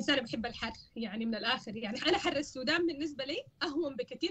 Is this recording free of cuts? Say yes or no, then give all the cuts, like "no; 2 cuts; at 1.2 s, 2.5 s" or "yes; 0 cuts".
yes; 0 cuts